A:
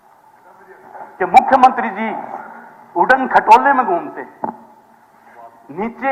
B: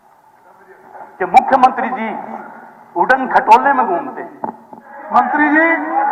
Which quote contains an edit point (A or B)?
B